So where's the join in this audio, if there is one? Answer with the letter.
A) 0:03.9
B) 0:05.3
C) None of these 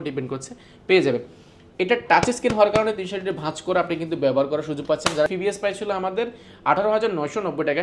B